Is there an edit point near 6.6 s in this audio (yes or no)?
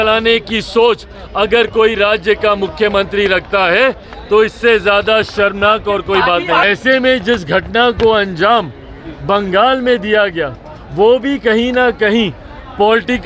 yes